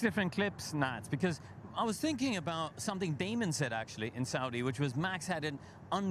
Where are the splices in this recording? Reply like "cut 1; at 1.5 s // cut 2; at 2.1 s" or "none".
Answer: none